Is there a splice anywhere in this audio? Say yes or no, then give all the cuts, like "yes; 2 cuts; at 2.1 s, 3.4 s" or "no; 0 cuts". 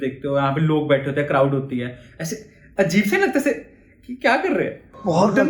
no; 0 cuts